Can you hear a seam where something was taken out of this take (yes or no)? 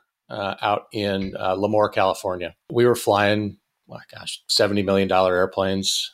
yes